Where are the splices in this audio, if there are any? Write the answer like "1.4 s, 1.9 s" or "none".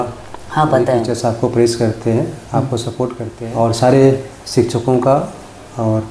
1.1 s, 3.3 s